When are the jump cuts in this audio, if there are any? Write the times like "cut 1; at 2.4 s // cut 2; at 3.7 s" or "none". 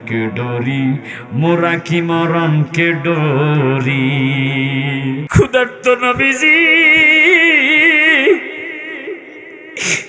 cut 1; at 5.2 s